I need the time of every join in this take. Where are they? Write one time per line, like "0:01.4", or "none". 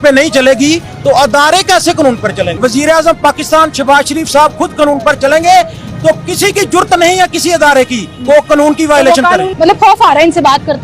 0:02.6
0:09.5